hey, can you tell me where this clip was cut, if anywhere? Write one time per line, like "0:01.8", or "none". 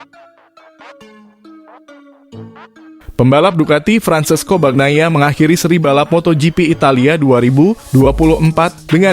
0:03.1